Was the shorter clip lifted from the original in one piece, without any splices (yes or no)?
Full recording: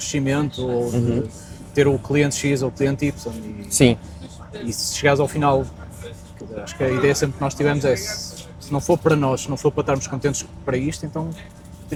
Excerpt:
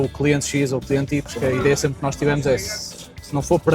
no